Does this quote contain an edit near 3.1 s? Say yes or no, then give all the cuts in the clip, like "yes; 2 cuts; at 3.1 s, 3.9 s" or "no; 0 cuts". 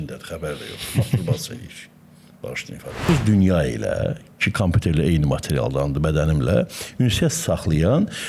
yes; 1 cut; at 3.1 s